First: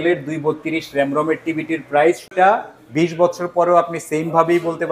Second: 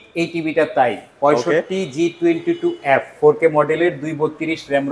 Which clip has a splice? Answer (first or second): first